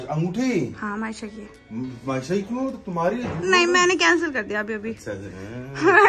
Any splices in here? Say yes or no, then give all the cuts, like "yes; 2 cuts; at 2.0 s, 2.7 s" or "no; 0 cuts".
no; 0 cuts